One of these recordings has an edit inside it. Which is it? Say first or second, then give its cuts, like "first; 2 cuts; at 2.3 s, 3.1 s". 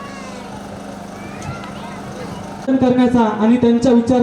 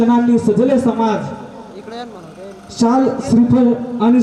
first; 1 cut; at 2.6 s